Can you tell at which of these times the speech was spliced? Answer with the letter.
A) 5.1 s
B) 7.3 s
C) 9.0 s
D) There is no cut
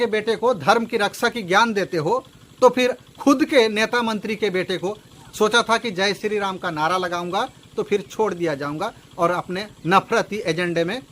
A